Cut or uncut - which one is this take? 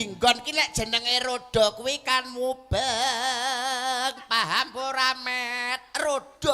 uncut